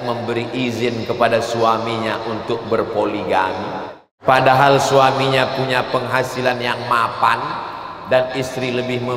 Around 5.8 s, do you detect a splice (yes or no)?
no